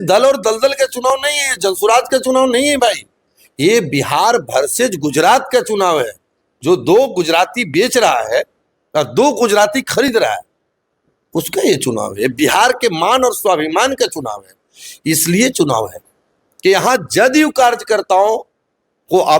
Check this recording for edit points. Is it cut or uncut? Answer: uncut